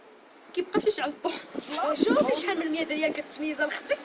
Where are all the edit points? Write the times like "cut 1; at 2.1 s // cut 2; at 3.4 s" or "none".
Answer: cut 1; at 2.1 s

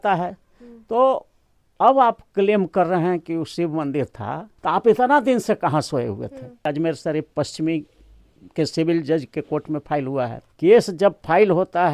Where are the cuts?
cut 1; at 4.5 s // cut 2; at 6.7 s // cut 3; at 10.4 s

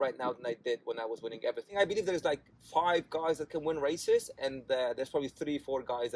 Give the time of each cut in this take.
cut 1; at 1.7 s

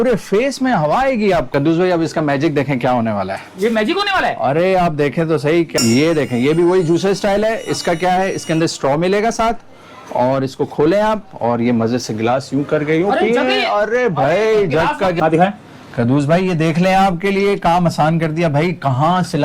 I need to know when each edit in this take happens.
cut 1; at 1.5 s // cut 2; at 5.7 s // cut 3; at 15.2 s

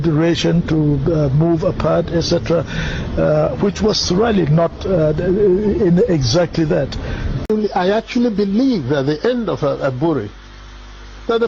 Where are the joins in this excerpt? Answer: cut 1; at 7.3 s

